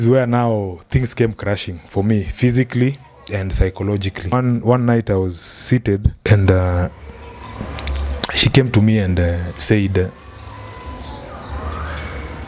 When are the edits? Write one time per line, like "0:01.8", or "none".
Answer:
0:04.3
0:06.1